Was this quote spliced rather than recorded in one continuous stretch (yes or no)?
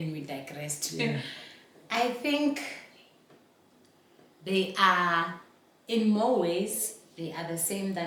no